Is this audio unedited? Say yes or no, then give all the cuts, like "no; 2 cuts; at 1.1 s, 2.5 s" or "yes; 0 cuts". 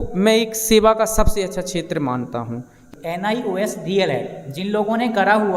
no; 1 cut; at 2.8 s